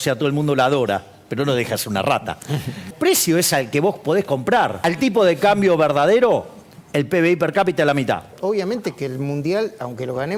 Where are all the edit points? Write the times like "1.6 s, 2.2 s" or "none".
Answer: 2.9 s, 4.8 s, 8.3 s

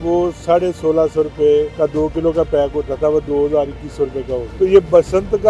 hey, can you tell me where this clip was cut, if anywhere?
1.7 s, 4.5 s

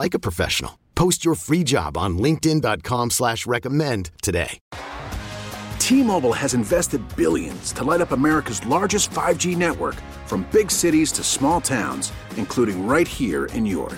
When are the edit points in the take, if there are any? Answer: 4.6 s

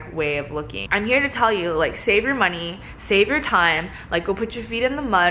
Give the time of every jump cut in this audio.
none

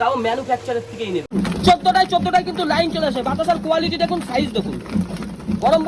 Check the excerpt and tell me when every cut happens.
1.3 s

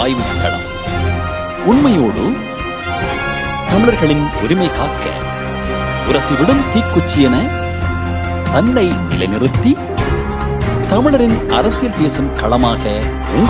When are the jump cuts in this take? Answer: none

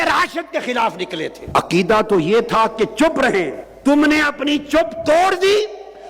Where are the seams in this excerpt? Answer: 1.4 s, 3.6 s

